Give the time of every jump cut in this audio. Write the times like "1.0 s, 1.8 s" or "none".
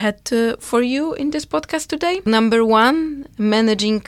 2.3 s